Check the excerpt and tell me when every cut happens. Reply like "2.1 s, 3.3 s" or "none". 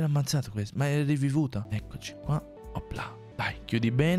1.6 s